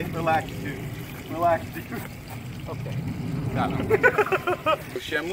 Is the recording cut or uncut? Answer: uncut